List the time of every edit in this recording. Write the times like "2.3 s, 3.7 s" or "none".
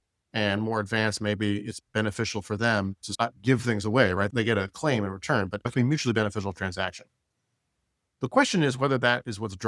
3.0 s, 4.3 s, 5.7 s